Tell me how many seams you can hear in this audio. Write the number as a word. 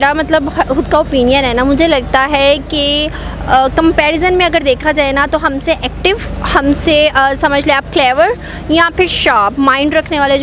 zero